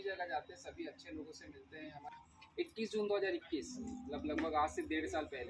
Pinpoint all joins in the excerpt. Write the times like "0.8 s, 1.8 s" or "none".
2.1 s